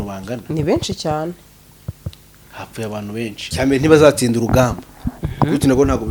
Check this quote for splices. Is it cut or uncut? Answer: cut